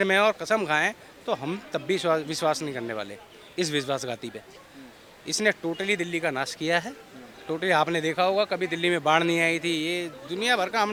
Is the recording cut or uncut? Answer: uncut